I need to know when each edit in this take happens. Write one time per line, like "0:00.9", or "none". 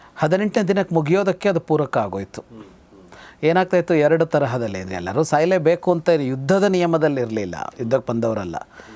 none